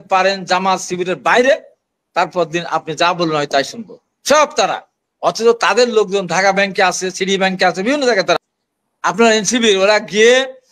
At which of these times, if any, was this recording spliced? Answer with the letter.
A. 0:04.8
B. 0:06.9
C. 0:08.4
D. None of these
C